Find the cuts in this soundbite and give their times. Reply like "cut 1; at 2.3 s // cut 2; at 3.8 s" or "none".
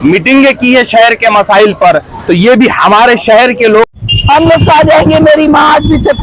cut 1; at 3.9 s